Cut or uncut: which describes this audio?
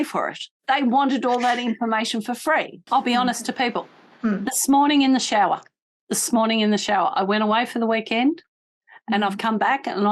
cut